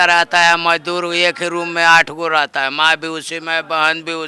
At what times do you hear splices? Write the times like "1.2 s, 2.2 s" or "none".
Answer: none